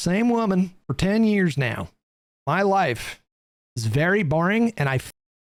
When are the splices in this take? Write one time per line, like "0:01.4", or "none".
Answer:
none